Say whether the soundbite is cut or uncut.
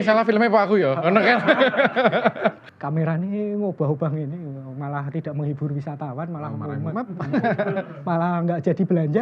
cut